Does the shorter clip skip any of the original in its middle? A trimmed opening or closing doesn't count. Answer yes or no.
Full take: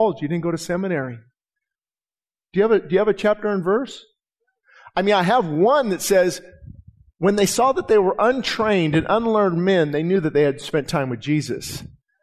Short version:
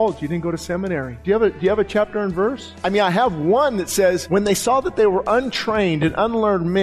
yes